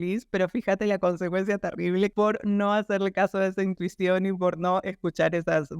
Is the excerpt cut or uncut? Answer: cut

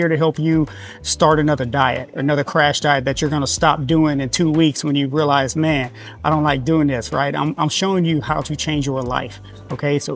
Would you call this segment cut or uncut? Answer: uncut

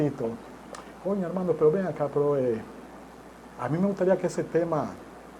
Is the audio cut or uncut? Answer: uncut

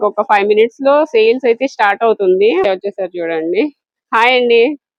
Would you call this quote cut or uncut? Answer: uncut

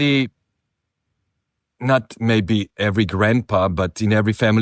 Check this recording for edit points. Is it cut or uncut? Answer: uncut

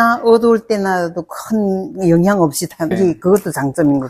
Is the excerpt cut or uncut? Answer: cut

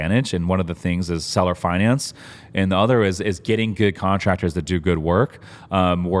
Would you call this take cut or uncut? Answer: uncut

